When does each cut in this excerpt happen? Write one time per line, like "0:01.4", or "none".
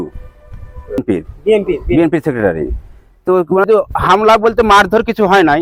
0:01.0
0:03.7